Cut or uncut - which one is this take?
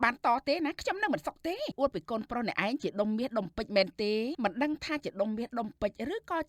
cut